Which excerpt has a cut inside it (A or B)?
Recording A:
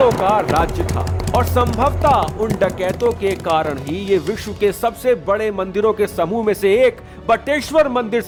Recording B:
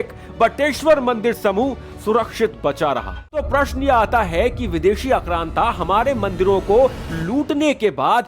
B